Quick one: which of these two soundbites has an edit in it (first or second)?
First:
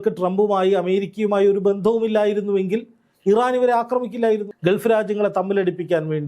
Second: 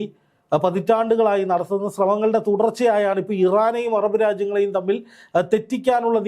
first